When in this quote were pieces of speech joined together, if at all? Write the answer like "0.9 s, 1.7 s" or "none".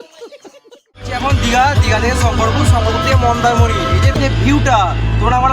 1.1 s